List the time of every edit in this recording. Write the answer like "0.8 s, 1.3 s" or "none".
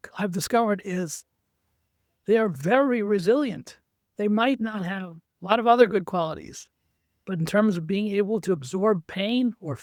none